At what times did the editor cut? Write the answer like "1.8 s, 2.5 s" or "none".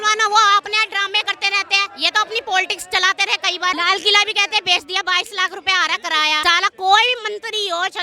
3.7 s, 6.4 s